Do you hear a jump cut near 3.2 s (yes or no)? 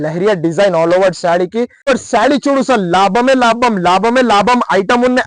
no